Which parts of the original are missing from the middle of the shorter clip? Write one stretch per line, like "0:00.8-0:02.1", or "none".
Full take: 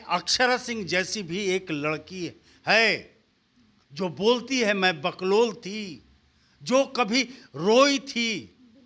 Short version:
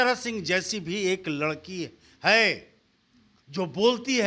none